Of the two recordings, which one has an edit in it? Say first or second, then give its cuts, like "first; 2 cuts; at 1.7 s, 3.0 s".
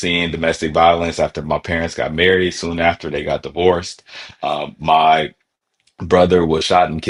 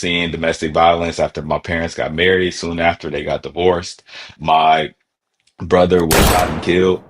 second; 1 cut; at 4.3 s